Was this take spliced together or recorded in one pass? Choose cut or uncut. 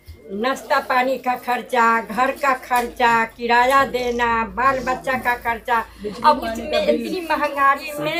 uncut